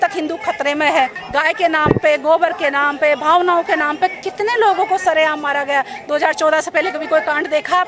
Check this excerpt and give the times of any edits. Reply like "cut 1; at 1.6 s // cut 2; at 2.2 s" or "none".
cut 1; at 1.1 s